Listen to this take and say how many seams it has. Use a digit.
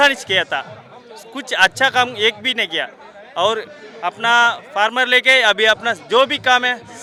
0